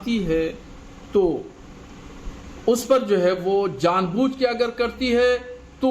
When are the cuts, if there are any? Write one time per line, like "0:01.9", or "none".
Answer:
0:03.4